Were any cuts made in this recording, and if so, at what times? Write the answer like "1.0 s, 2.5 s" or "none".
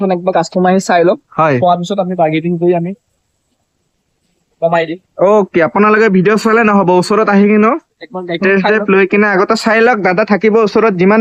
none